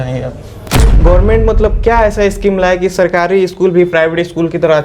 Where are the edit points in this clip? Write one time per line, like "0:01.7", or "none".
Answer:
0:00.9